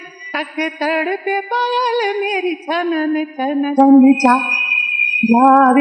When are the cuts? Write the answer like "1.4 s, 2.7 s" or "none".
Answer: none